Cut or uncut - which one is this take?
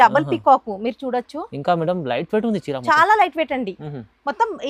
uncut